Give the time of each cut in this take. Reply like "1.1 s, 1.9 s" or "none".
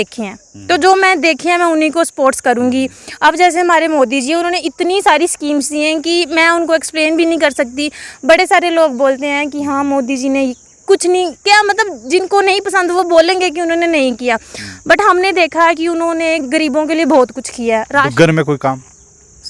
none